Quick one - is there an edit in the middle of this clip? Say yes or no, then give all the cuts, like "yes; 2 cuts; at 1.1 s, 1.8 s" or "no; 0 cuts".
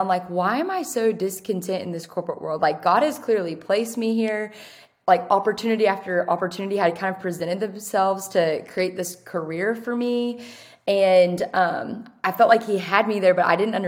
no; 0 cuts